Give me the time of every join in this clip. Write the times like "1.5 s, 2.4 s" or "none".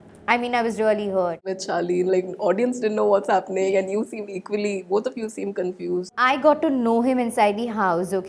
1.5 s, 6.1 s